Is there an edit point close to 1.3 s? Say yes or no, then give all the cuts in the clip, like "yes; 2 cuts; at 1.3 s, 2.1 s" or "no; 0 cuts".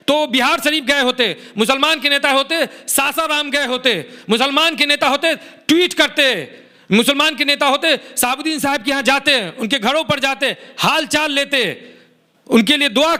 no; 0 cuts